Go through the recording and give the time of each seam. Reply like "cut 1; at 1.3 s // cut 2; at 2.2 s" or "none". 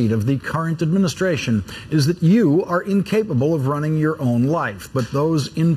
cut 1; at 3.1 s